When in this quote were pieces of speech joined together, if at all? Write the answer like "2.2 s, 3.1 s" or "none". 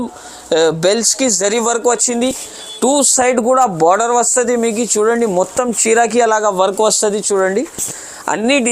none